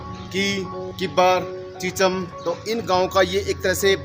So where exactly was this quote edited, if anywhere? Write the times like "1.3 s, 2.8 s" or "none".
2.3 s